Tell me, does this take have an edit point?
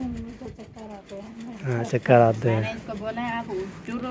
no; 0 cuts

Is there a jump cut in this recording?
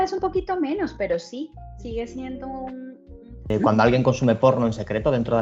yes; 1 cut; at 3.5 s

